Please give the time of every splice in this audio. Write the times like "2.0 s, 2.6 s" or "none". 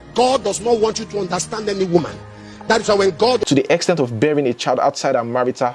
3.4 s